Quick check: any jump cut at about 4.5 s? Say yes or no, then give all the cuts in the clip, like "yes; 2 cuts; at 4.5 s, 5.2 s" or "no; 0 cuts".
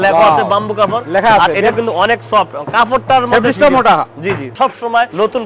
yes; 1 cut; at 4.5 s